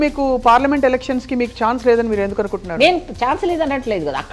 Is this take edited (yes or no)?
no